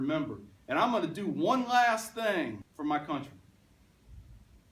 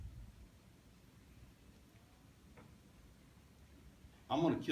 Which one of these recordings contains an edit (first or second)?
first